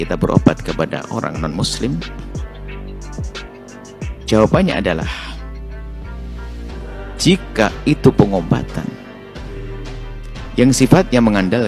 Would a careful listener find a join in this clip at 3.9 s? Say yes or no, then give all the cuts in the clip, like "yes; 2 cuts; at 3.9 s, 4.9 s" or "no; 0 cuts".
yes; 4 cuts; at 2.3 s, 3.9 s, 8.9 s, 10.5 s